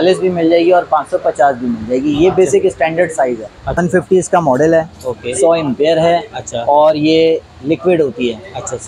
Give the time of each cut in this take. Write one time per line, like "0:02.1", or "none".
0:03.8